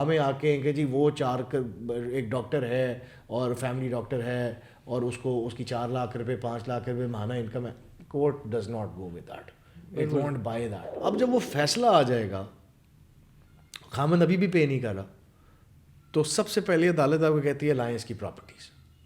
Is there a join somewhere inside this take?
yes; 1 cut; at 10.8 s

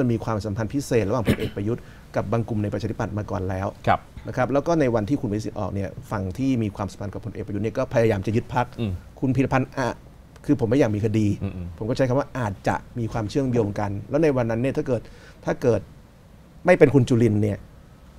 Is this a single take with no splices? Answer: yes; 0 cuts

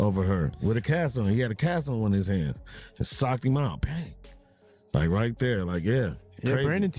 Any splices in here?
no; 0 cuts

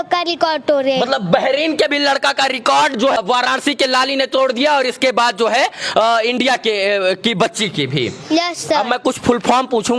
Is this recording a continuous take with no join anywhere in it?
yes; 0 cuts

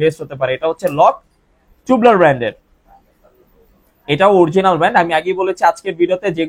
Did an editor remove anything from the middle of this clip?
no; 0 cuts

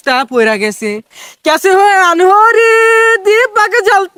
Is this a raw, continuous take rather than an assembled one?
yes; 0 cuts

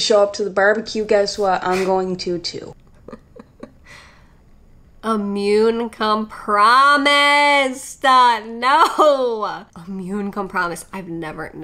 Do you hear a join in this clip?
yes; 1 cut; at 9.7 s

